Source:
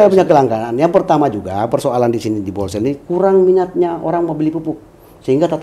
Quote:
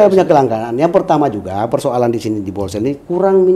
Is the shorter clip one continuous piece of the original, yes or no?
yes